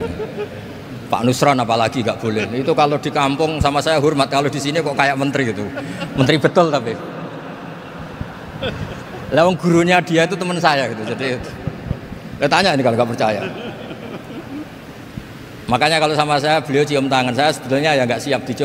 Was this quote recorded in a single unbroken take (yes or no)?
yes